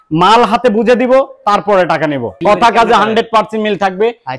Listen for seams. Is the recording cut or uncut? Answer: cut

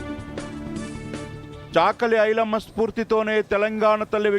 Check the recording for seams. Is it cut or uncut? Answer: cut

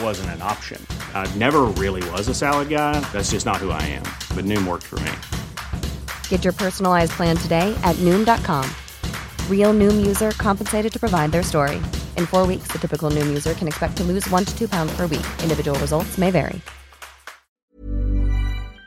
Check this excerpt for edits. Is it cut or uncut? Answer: cut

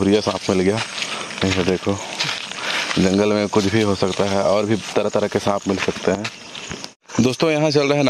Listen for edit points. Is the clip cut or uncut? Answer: cut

